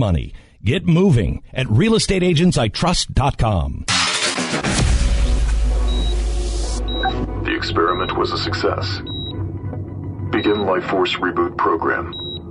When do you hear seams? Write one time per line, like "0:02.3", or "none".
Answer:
0:03.9